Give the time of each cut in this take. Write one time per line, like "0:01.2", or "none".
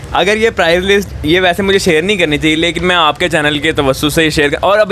none